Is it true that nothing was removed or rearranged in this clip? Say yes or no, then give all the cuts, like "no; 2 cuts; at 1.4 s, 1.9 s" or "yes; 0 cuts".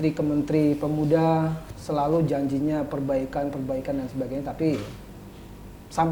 yes; 0 cuts